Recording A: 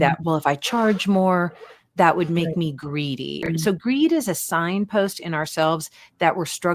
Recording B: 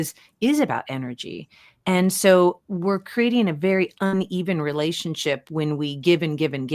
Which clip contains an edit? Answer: A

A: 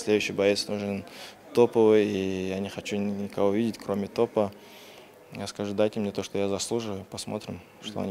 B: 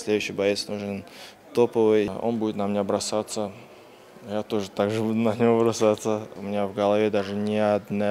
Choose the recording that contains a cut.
B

